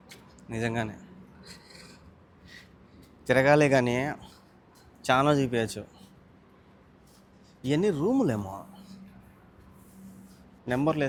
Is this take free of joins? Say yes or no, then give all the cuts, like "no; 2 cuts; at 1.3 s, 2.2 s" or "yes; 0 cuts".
yes; 0 cuts